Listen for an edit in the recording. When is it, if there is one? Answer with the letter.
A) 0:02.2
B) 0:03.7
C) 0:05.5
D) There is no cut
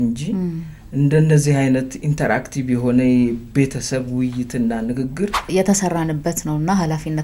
C